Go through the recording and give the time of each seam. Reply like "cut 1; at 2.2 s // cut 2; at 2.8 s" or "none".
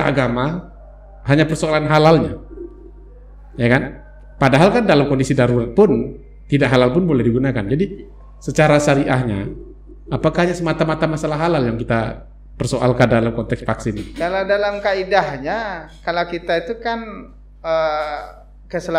none